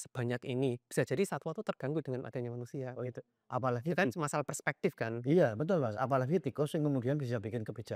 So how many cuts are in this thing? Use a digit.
0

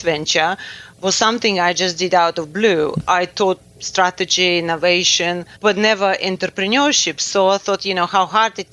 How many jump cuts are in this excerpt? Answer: 2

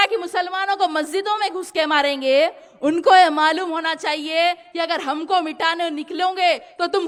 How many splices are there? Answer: 0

